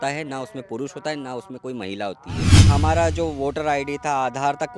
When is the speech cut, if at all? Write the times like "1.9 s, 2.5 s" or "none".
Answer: 2.5 s